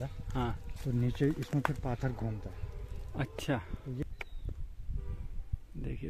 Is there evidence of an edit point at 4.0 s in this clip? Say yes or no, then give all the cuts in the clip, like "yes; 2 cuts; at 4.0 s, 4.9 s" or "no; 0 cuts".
yes; 1 cut; at 4.0 s